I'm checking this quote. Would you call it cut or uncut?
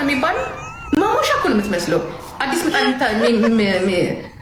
uncut